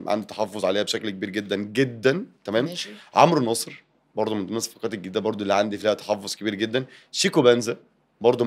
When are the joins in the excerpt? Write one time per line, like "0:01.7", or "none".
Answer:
none